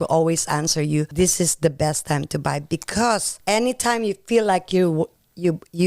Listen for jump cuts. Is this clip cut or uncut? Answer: cut